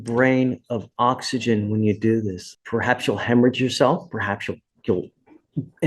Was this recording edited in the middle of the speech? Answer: yes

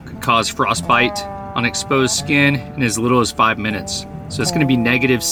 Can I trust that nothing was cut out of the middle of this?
yes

